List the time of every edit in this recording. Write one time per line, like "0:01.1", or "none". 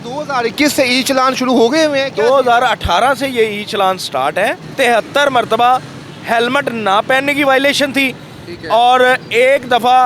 0:04.6